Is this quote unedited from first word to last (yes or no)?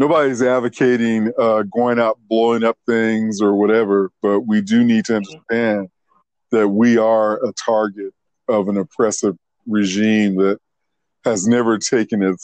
yes